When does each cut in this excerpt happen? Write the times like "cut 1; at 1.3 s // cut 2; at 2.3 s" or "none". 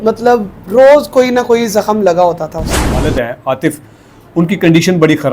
cut 1; at 3.1 s